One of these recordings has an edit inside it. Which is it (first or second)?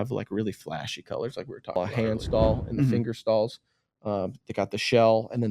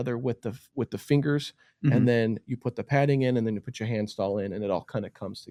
first